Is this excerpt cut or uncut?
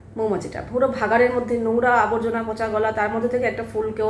uncut